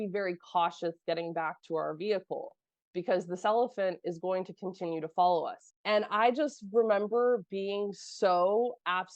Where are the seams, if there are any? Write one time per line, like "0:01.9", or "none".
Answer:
0:05.6